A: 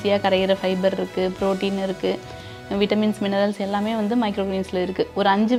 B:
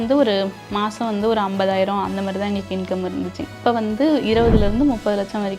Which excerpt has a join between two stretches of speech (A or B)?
B